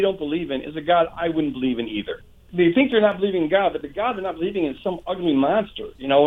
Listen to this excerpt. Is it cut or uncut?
cut